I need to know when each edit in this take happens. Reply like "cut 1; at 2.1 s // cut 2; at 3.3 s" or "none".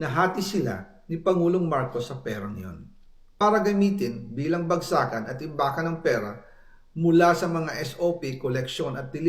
cut 1; at 3.4 s